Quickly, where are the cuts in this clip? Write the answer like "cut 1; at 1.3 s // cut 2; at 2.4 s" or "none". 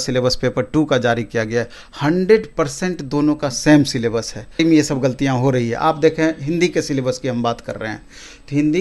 cut 1; at 4.6 s